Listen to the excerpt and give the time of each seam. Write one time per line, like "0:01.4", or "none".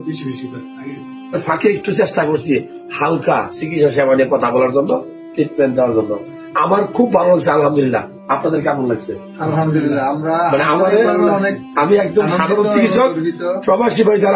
0:01.4